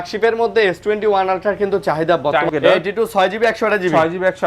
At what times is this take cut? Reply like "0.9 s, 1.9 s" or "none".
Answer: 2.5 s